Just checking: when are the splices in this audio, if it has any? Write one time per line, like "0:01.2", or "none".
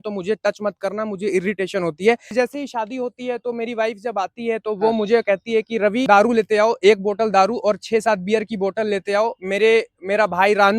0:02.3
0:06.0